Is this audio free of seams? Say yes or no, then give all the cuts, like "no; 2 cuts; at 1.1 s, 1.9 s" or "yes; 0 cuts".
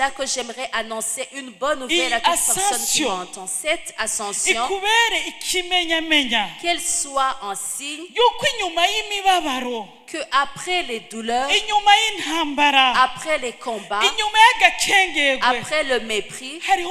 yes; 0 cuts